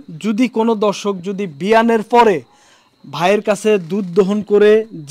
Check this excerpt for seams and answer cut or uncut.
uncut